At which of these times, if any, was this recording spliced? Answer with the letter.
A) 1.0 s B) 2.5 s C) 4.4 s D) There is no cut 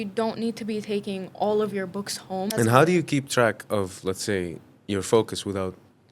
B